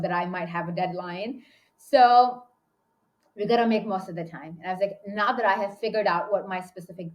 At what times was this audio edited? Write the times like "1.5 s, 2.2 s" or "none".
none